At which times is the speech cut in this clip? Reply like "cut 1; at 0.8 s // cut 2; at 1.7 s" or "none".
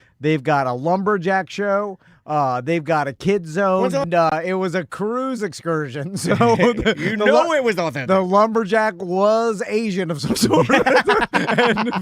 cut 1; at 4.1 s

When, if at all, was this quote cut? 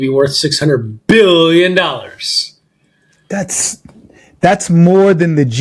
none

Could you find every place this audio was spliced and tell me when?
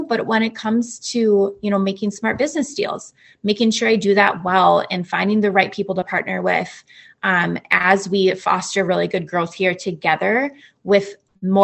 none

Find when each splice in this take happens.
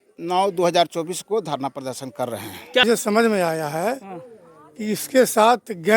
cut 1; at 2.8 s

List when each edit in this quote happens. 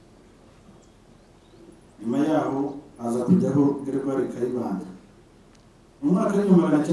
none

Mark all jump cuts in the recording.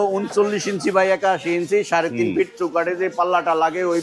none

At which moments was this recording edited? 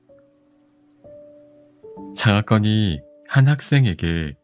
none

